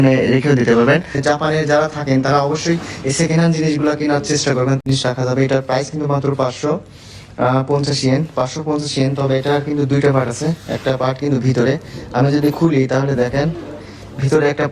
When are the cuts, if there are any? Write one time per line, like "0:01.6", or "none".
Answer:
0:01.2
0:04.8